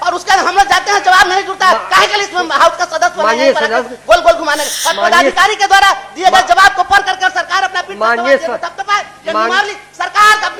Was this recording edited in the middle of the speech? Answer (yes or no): no